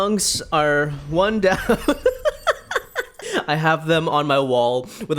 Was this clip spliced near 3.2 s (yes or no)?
yes